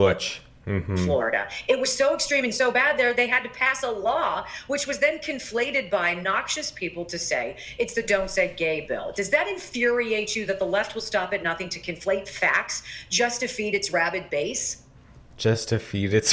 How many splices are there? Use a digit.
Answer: 0